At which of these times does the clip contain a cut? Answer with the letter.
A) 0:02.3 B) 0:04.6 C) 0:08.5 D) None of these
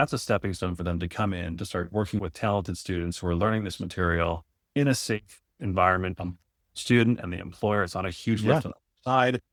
D